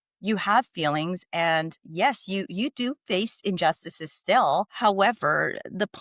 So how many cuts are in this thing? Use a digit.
1